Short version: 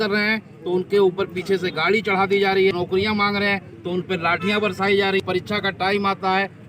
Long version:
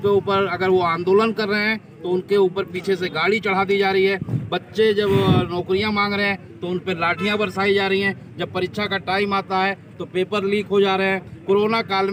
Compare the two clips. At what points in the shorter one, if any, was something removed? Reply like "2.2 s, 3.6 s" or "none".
2.7 s, 5.2 s